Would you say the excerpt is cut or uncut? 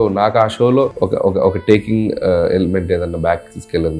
cut